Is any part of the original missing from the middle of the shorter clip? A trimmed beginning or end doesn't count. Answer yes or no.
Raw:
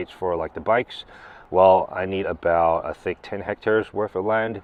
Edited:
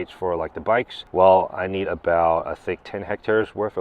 yes